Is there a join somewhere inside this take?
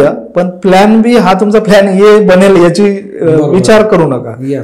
no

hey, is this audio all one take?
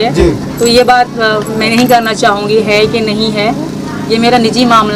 yes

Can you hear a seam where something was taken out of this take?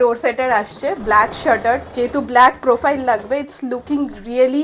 no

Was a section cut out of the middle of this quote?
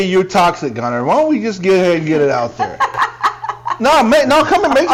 no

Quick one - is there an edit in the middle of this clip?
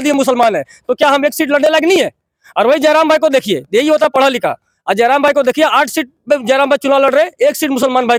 no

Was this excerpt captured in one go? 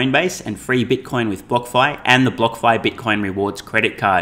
yes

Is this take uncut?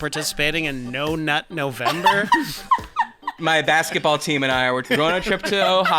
no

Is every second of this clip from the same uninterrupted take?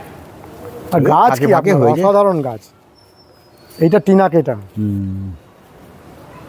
yes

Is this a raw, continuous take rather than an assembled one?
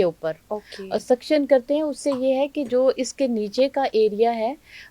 yes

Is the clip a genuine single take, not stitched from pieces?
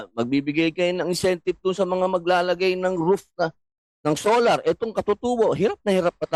yes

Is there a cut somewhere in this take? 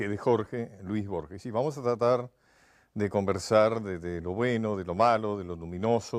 no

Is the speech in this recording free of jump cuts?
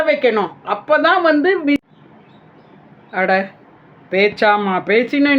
no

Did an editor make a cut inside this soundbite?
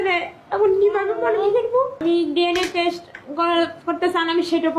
yes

